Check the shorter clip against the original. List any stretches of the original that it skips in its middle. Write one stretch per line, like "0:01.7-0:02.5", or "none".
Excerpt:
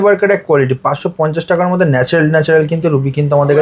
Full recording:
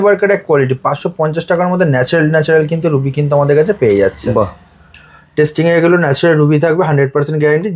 none